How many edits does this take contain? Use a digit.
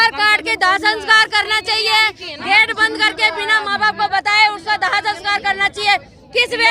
0